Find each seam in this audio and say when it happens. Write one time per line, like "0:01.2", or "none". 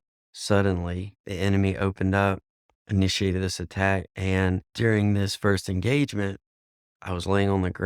0:01.2
0:04.7